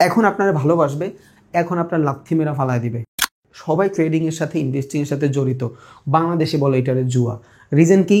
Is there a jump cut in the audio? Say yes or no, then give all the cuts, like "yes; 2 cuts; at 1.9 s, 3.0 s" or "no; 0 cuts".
yes; 1 cut; at 3.1 s